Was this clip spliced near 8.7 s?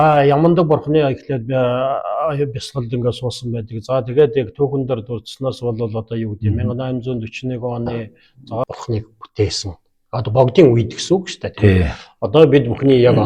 yes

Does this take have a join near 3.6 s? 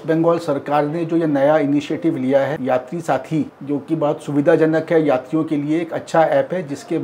yes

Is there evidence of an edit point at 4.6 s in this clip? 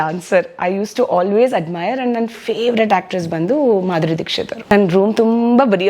yes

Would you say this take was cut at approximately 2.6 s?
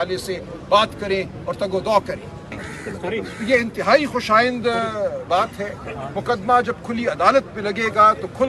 yes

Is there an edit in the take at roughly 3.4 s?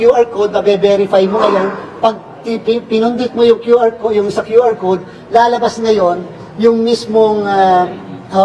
no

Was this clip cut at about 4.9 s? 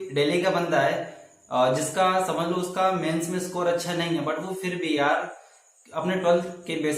no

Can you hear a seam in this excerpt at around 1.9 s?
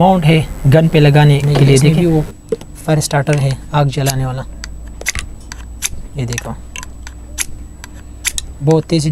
yes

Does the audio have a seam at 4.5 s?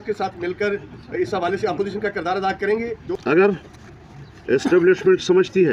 no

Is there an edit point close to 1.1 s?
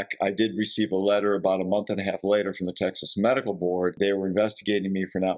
no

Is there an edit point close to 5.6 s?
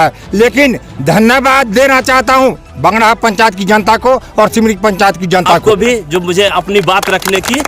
yes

